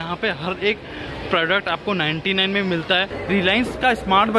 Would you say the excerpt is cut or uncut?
cut